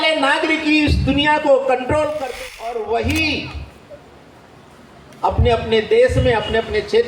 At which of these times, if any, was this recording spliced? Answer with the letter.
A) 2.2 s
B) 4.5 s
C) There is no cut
A